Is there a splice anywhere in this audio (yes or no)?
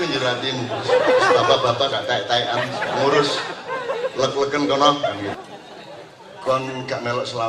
yes